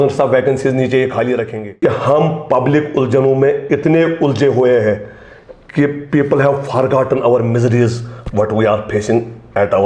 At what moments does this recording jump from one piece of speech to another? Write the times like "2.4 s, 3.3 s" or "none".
1.6 s